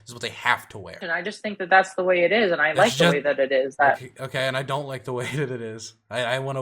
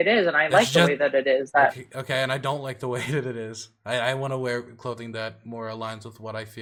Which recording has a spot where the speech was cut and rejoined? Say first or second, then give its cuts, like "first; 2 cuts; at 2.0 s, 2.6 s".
first; 1 cut; at 1.0 s